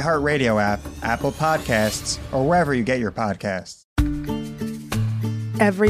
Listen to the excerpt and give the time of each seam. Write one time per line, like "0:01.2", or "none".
0:03.8

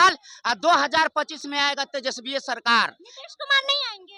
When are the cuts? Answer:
none

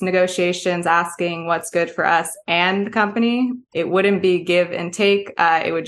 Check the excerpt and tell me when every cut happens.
0:03.6

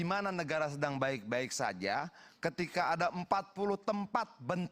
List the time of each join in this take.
none

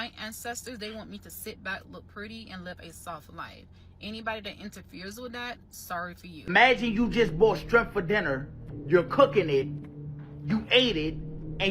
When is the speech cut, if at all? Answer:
0:06.4

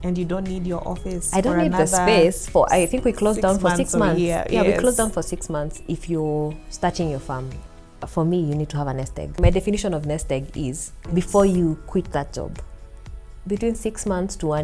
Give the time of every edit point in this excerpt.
0:05.7
0:07.6
0:09.4
0:10.9

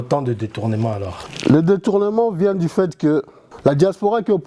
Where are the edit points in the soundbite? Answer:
0:01.2
0:03.4

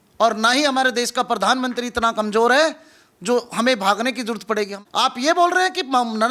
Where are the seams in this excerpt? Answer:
0:04.7

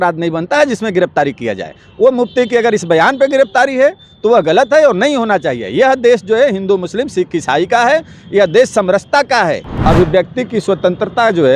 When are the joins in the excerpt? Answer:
0:09.7

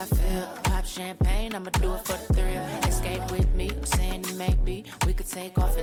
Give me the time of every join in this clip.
none

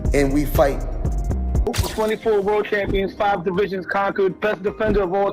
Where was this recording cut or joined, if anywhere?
0:01.7

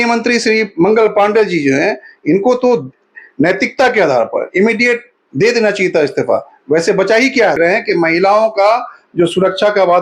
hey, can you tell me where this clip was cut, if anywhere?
0:07.6

